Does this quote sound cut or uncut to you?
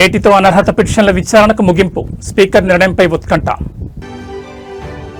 uncut